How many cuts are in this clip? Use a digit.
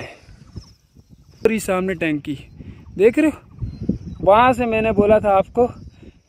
1